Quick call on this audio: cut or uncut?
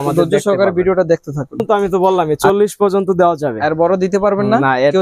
cut